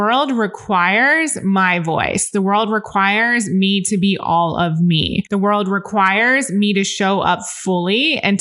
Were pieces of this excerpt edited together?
yes; 1 cut; at 5.2 s

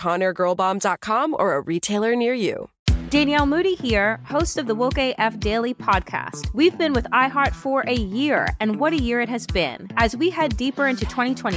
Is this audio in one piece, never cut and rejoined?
no; 1 cut; at 2.7 s

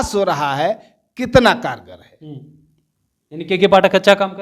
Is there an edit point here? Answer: no; 0 cuts

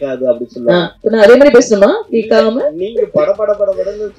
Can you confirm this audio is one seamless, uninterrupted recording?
yes; 0 cuts

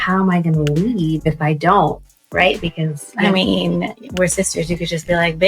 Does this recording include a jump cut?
no; 0 cuts

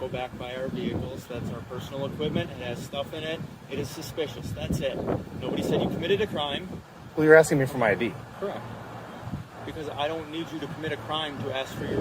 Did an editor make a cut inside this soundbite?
yes; 1 cut; at 8.0 s

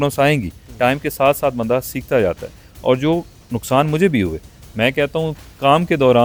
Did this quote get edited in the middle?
no; 0 cuts

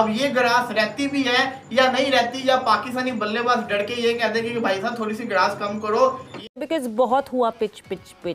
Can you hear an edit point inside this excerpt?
yes; 1 cut; at 6.4 s

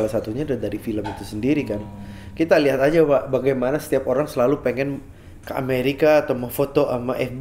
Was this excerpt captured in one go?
yes; 0 cuts

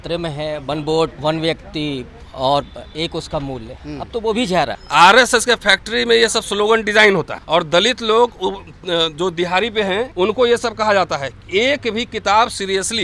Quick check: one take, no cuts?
no; 4 cuts; at 1.2 s, 4.8 s, 7.4 s, 10.1 s

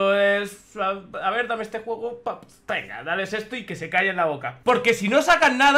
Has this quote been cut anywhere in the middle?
yes; 1 cut; at 4.5 s

